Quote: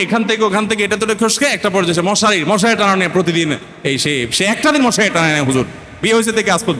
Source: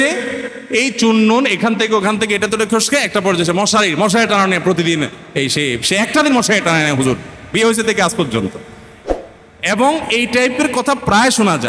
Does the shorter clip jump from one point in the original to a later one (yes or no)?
no